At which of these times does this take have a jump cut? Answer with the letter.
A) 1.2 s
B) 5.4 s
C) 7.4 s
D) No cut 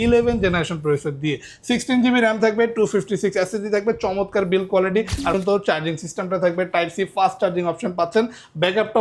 B